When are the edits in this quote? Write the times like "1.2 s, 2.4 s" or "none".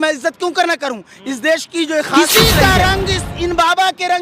2.1 s